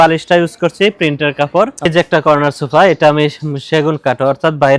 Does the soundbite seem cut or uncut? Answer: cut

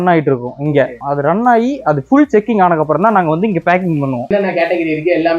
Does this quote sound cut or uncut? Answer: cut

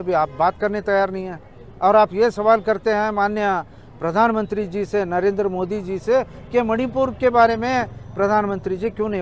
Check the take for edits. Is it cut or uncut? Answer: uncut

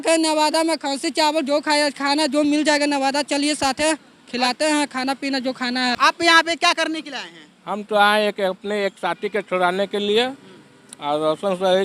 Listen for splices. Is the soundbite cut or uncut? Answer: cut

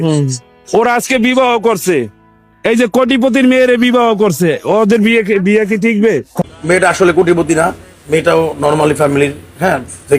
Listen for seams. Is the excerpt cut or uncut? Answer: cut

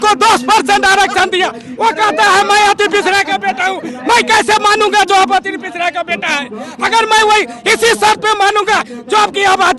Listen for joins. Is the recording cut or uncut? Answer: uncut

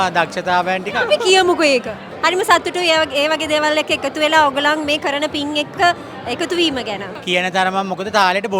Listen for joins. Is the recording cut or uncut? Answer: cut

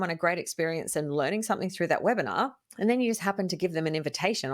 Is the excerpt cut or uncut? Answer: cut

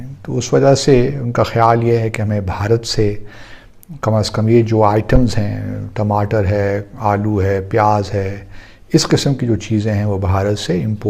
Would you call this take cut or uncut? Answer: uncut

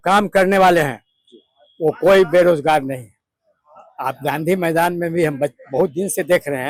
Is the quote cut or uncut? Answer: uncut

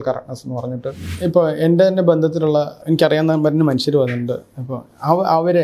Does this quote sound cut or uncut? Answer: cut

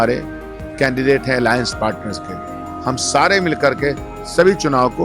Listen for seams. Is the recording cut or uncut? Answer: uncut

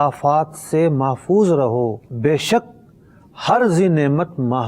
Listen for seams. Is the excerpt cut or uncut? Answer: cut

